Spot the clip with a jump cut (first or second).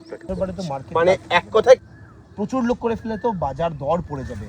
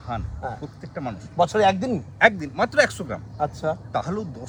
first